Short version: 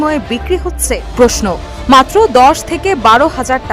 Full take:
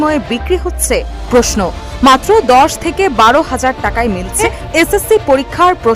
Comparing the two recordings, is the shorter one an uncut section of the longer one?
no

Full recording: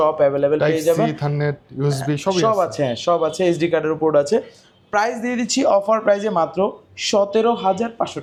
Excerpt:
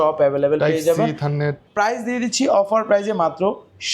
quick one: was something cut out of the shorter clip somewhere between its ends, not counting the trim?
yes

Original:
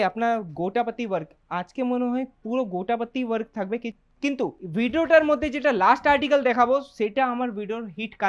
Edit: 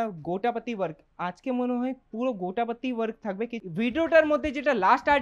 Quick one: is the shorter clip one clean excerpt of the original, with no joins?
no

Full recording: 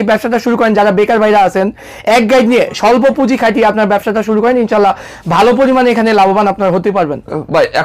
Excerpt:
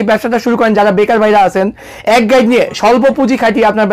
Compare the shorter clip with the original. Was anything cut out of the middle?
no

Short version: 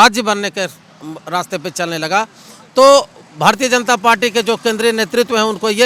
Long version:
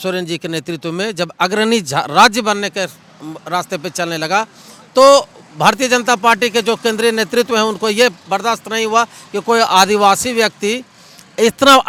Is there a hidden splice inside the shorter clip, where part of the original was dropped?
no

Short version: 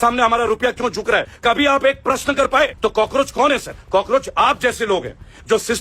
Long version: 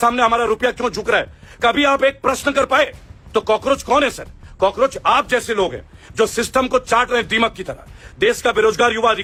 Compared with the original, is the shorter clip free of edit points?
no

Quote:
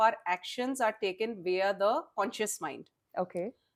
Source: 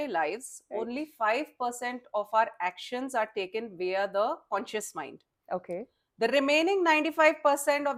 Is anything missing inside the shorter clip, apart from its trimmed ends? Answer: no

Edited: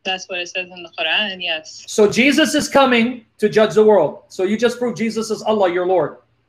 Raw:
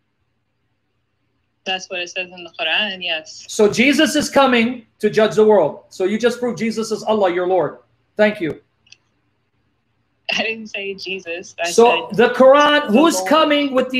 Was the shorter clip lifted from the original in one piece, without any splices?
yes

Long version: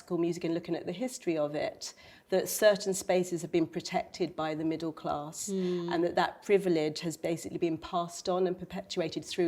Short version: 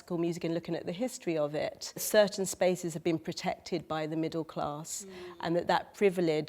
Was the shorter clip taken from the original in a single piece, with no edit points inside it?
no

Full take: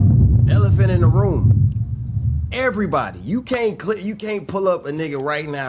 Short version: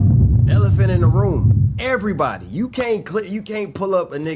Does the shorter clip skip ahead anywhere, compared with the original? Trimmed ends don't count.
yes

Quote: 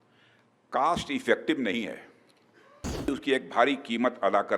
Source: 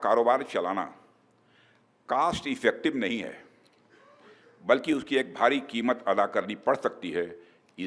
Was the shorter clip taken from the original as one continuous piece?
no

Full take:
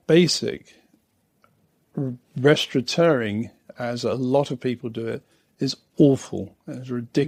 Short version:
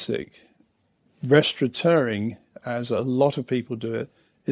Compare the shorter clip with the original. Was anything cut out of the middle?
yes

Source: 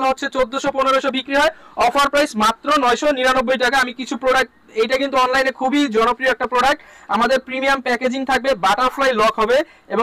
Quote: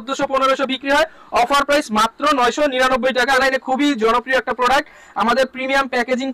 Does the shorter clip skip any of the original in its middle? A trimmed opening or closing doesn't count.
yes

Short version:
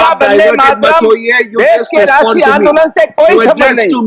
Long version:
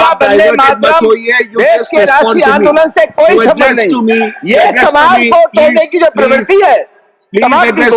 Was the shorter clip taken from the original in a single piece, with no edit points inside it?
yes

